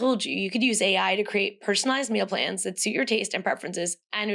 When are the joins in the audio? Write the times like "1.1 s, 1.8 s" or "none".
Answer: none